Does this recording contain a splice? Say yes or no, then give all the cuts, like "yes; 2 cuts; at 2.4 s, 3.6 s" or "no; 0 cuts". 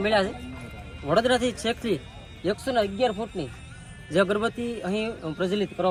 no; 0 cuts